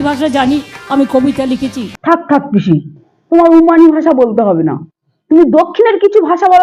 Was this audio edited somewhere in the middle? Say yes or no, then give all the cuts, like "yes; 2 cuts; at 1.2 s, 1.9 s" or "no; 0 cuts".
no; 0 cuts